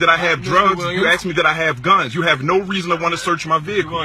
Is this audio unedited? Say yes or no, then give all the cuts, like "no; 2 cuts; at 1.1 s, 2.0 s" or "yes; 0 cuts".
yes; 0 cuts